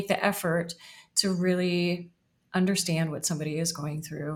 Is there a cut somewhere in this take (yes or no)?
no